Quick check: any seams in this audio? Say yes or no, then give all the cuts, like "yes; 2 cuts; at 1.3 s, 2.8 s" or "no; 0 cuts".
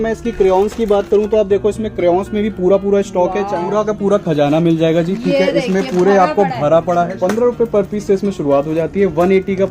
yes; 2 cuts; at 3.6 s, 7.1 s